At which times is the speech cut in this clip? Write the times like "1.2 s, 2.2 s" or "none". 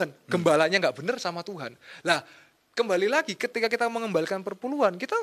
none